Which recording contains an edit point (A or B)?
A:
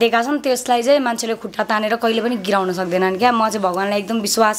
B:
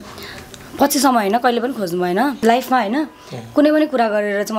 B